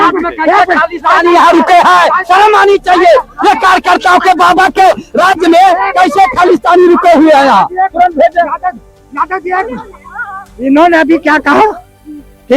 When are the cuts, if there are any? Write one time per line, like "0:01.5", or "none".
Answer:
none